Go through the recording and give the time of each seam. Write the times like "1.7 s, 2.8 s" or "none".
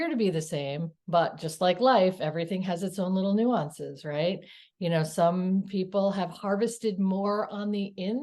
0.9 s